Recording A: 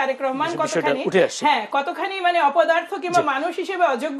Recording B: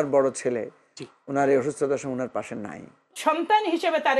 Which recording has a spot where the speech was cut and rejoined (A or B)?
B